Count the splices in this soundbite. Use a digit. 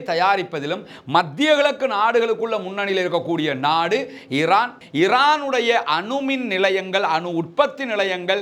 1